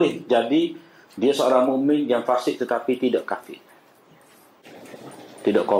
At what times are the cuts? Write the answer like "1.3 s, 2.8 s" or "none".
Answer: 4.7 s